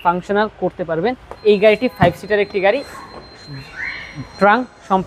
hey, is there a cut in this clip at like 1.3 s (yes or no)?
yes